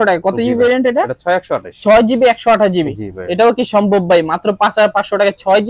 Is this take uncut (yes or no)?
yes